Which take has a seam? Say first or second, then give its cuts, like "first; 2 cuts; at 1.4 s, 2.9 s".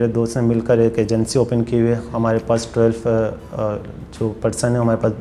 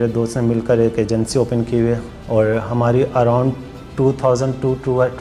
second; 1 cut; at 2.1 s